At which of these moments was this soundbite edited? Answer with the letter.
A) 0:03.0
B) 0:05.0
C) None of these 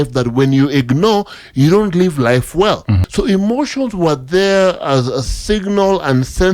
A